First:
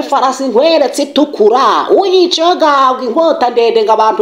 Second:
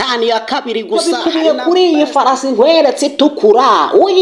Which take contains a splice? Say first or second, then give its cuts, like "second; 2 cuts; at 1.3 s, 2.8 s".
second; 1 cut; at 1.1 s